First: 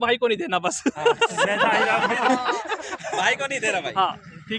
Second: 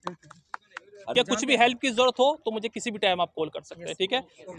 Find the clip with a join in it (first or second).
second